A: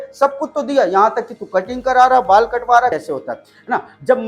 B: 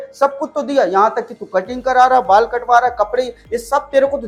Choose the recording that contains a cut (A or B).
A